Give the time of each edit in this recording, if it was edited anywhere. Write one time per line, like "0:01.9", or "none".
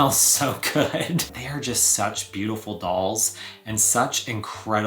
0:01.3